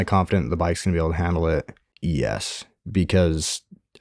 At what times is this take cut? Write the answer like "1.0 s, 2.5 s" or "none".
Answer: 1.8 s